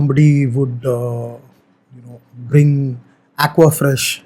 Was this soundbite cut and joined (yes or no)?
no